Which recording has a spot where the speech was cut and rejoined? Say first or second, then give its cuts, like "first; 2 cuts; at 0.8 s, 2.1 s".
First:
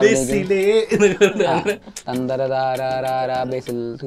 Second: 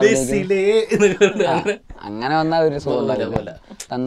first; 1 cut; at 1.9 s